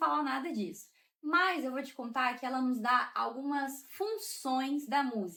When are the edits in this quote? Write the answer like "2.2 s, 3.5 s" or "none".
none